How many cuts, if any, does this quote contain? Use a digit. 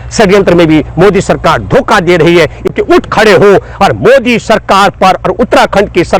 1